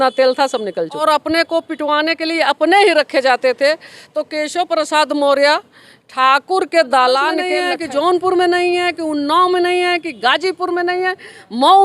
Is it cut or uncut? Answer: cut